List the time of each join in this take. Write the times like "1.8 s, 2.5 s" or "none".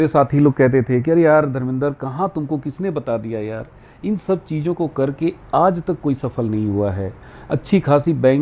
none